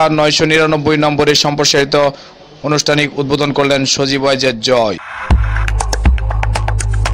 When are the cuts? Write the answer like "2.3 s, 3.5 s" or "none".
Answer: none